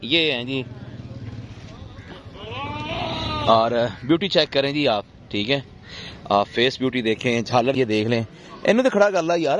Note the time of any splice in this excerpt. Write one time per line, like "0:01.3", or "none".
0:07.8